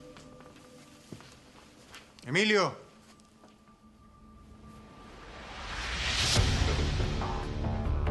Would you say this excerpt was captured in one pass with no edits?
no; 1 cut; at 3.9 s

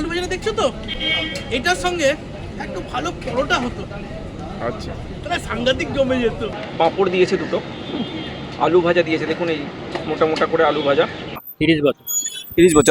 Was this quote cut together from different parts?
yes; 3 cuts; at 0.9 s, 6.6 s, 11.4 s

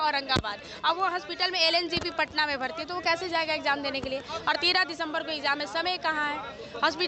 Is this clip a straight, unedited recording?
yes; 0 cuts

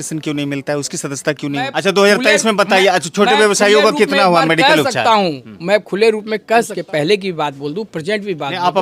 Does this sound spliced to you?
yes; 2 cuts; at 1.7 s, 6.8 s

